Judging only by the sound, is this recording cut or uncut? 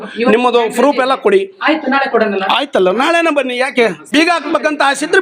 cut